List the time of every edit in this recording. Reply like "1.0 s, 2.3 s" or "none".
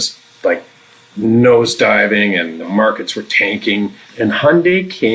2.6 s, 4.0 s